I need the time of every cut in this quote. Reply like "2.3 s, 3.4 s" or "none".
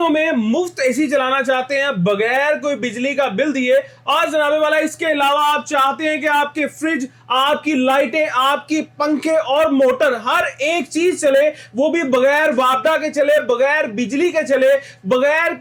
none